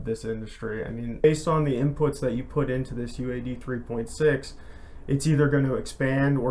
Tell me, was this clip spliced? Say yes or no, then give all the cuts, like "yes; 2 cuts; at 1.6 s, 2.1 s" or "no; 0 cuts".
yes; 1 cut; at 1.2 s